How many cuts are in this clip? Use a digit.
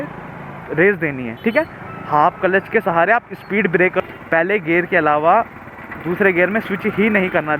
1